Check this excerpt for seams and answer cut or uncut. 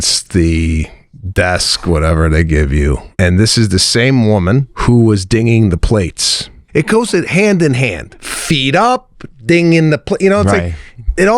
cut